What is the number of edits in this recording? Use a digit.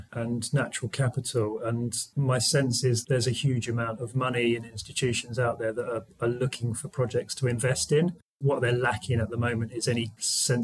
0